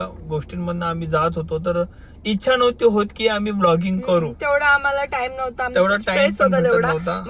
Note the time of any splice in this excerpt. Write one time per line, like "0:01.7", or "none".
none